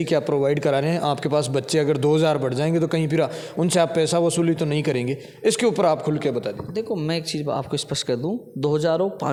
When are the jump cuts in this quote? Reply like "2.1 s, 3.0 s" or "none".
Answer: none